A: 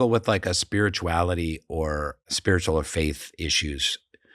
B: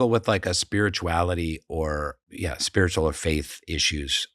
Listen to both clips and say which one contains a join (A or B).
A